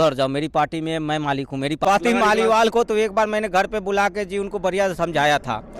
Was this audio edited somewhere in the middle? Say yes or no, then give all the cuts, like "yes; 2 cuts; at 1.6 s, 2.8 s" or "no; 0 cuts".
yes; 1 cut; at 1.8 s